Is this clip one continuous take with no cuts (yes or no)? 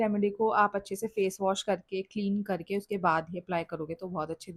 yes